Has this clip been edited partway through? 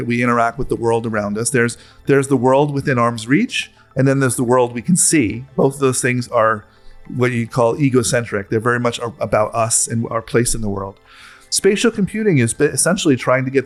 no; 0 cuts

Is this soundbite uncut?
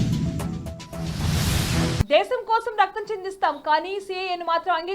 no; 1 cut; at 2.0 s

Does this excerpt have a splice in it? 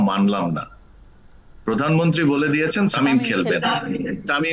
yes; 1 cut; at 2.9 s

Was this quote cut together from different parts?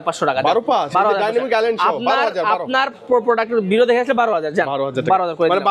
no; 0 cuts

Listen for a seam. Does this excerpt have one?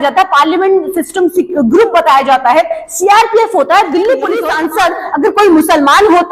yes; 1 cut; at 4.5 s

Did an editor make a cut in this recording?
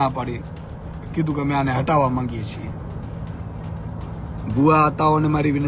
no; 0 cuts

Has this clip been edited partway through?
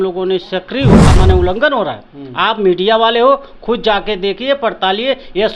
yes; 1 cut; at 1.1 s

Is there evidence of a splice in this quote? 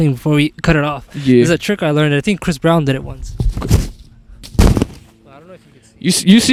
no; 0 cuts

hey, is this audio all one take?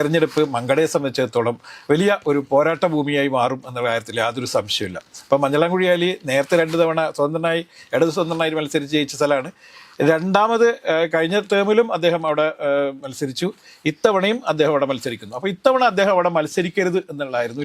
yes; 0 cuts

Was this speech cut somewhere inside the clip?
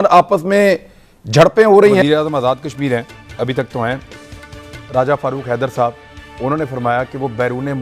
yes; 1 cut; at 2.0 s

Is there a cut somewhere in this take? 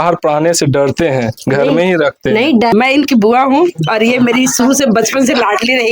yes; 1 cut; at 2.7 s

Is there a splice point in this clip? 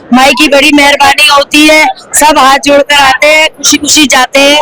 no; 0 cuts

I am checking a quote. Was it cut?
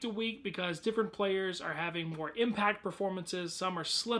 yes; 1 cut; at 1.1 s

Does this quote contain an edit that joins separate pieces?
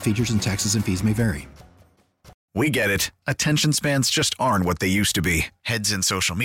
yes; 1 cut; at 2.4 s

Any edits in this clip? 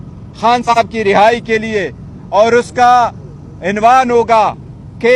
no; 0 cuts

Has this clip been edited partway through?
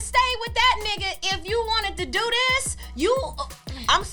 no; 0 cuts

